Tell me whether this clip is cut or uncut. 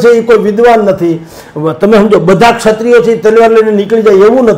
uncut